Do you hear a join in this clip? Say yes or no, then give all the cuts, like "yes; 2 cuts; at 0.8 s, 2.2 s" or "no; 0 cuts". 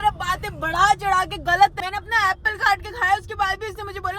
yes; 1 cut; at 1.8 s